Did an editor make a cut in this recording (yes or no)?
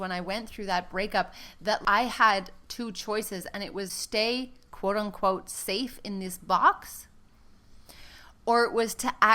yes